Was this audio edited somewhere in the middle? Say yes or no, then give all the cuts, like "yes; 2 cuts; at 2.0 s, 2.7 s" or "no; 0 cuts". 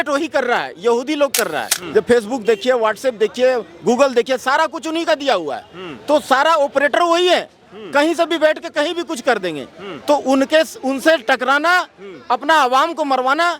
yes; 1 cut; at 1.8 s